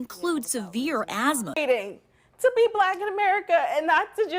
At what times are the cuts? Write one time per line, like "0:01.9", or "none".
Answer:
0:01.6